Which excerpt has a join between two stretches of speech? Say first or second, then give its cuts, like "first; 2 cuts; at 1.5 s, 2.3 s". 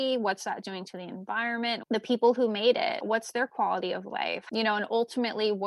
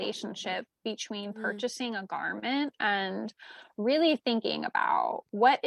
first; 2 cuts; at 1.8 s, 4.4 s